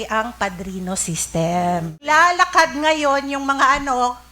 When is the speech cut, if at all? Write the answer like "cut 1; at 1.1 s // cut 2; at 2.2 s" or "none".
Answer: cut 1; at 2.0 s